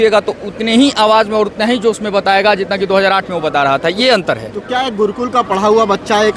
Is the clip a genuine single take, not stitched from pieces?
yes; 0 cuts

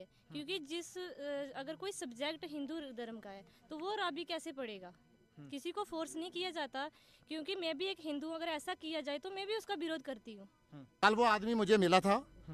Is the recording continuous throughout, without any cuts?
no; 1 cut; at 11.0 s

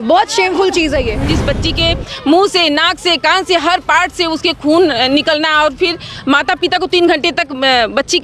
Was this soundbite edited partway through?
yes; 1 cut; at 1.3 s

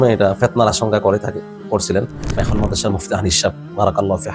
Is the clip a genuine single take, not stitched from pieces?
no; 1 cut; at 2.2 s

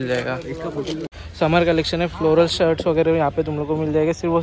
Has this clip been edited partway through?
yes; 1 cut; at 1.1 s

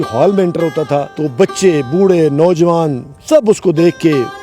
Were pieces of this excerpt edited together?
yes; 1 cut; at 1.1 s

